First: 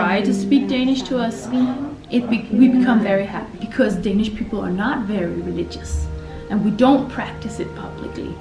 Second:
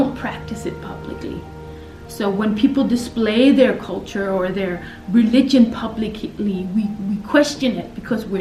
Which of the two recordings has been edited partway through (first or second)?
first